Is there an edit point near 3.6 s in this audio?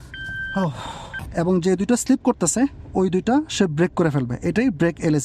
no; 1 cut; at 1.3 s

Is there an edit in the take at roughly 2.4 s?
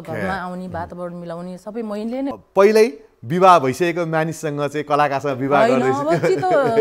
yes; 1 cut; at 2.4 s

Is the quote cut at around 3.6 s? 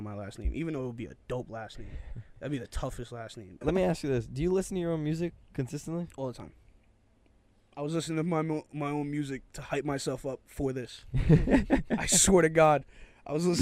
yes; 1 cut; at 3.6 s

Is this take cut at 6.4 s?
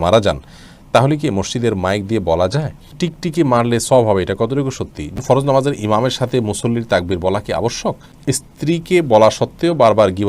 no; 3 cuts; at 3.0 s, 5.1 s, 8.1 s

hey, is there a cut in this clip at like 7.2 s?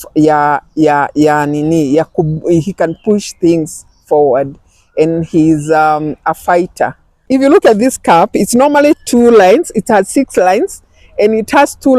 yes; 1 cut; at 7.2 s

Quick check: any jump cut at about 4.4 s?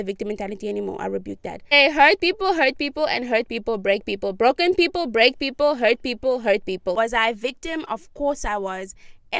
no; 2 cuts; at 1.8 s, 6.9 s

